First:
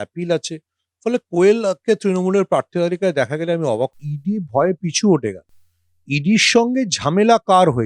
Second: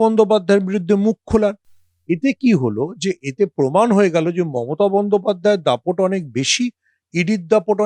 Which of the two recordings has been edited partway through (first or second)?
first